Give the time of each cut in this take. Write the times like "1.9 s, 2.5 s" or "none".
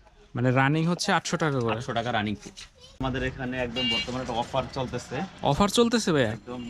3.0 s

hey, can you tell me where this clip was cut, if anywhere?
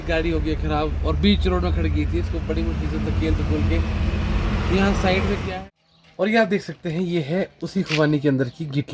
5.5 s

